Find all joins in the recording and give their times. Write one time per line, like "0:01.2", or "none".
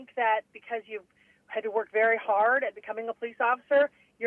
none